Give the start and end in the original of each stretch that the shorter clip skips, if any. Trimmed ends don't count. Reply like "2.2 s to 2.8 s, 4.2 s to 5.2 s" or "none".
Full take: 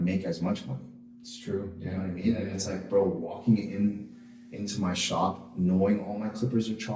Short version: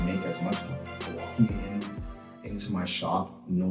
1.1 s to 3.2 s